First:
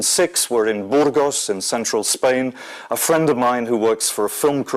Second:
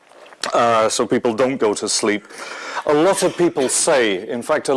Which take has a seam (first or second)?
first